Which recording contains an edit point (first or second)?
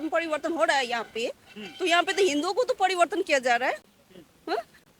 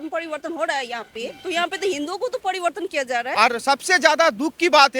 second